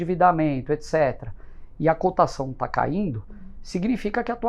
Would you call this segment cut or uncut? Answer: uncut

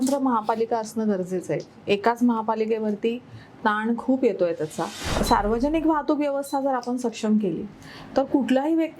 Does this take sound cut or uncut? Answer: cut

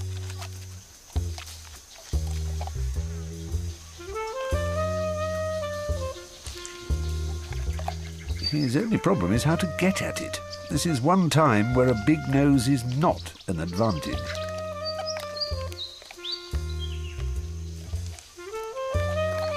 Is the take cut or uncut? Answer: uncut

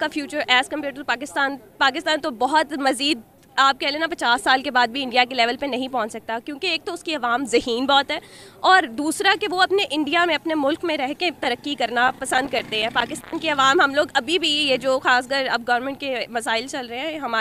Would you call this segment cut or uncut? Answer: uncut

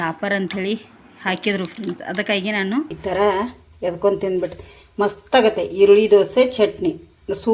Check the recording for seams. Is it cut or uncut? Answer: cut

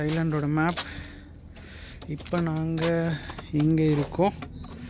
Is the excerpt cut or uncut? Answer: uncut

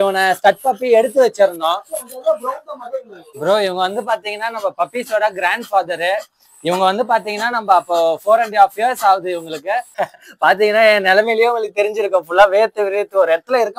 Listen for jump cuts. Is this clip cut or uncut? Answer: cut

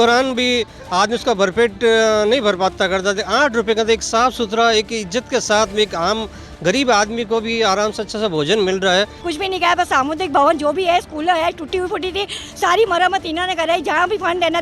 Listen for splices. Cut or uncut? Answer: cut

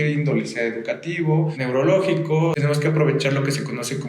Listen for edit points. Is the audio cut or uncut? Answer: cut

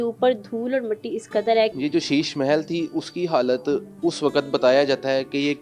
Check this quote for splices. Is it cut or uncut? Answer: cut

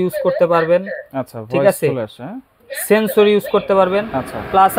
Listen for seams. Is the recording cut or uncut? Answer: uncut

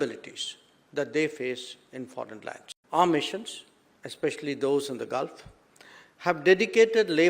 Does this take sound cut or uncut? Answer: cut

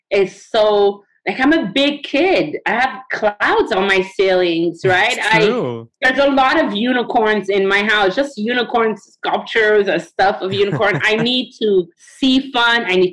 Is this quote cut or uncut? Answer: uncut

